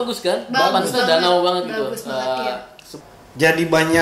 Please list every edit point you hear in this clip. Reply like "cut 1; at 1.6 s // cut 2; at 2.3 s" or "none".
cut 1; at 2.9 s